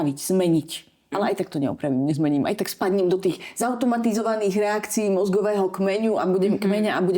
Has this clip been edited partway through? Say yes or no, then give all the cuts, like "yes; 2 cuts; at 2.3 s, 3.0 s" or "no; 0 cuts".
yes; 1 cut; at 1.1 s